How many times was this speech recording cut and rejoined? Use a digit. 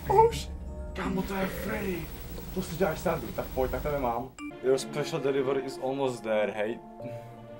1